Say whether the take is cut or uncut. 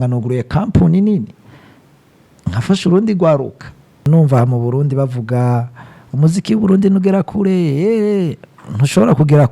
cut